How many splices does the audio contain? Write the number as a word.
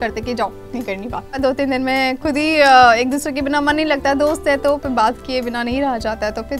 one